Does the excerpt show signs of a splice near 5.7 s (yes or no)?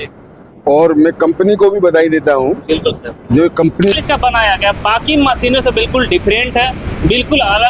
no